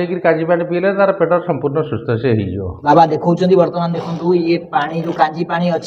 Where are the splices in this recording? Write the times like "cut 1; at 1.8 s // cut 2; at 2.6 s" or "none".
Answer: cut 1; at 2.7 s